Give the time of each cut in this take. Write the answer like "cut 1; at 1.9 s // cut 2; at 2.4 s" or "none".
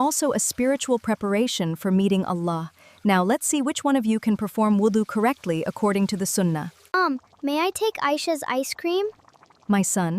cut 1; at 6.7 s